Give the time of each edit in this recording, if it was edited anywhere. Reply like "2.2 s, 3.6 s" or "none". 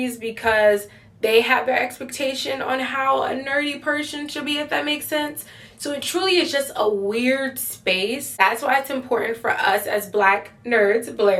8.3 s